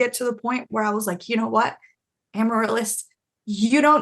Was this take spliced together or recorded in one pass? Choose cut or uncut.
uncut